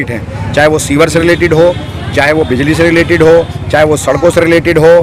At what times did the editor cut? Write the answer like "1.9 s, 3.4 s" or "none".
none